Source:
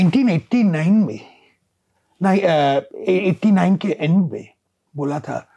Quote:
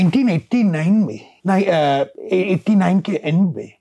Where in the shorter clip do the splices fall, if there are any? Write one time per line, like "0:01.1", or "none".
0:01.3